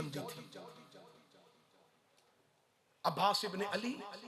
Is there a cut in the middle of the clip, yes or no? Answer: no